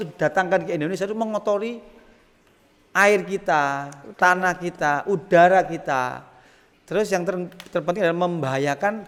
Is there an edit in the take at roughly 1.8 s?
no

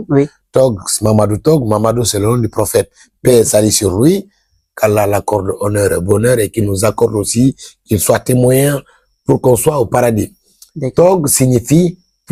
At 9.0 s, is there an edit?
no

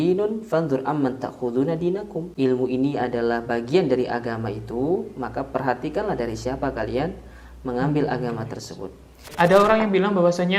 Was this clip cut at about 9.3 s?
yes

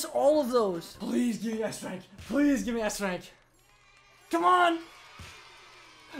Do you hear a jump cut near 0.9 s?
yes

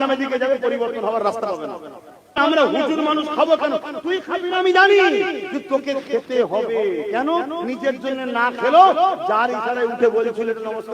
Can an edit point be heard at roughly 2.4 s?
yes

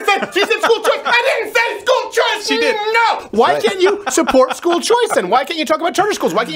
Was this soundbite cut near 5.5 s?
no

